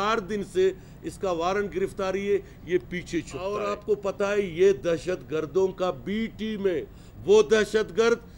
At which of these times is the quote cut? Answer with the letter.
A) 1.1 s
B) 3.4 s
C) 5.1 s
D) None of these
B